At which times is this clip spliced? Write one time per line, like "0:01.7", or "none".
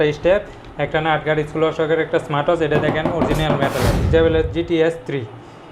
0:04.1